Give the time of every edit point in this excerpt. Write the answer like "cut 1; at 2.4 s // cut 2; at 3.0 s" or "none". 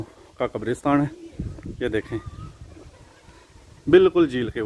none